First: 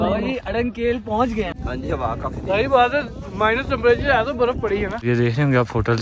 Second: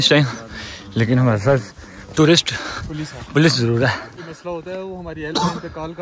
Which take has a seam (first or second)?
first